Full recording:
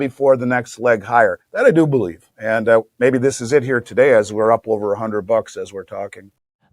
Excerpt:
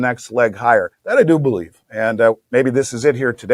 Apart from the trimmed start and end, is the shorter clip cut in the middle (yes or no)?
no